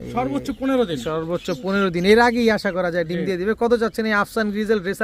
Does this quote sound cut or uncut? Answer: uncut